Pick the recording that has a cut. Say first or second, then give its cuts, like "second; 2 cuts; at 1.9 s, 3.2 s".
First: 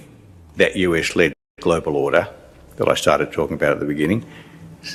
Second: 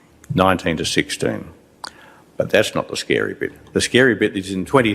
second; 1 cut; at 3.5 s